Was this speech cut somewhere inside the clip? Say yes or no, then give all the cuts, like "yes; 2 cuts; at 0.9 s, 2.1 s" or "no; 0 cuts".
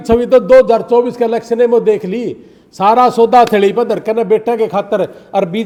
no; 0 cuts